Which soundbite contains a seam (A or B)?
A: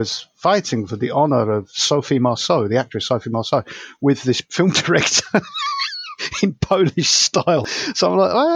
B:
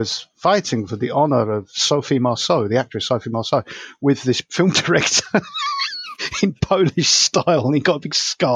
A